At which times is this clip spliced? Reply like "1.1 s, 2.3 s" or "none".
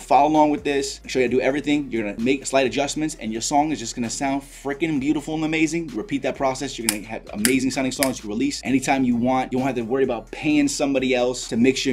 2.3 s

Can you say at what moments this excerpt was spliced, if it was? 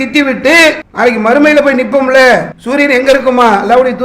0.9 s, 2.6 s

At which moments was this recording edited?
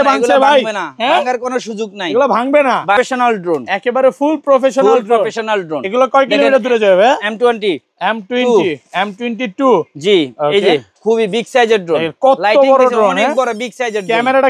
3.0 s

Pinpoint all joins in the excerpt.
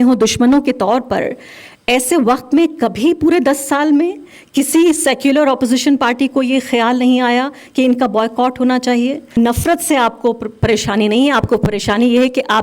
9.3 s

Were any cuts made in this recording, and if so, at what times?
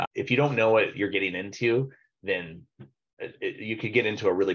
none

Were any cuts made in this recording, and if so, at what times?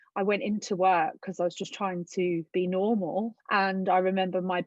2.5 s, 3.4 s

